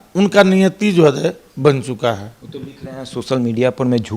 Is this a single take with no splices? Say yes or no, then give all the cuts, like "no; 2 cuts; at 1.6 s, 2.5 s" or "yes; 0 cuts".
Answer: yes; 0 cuts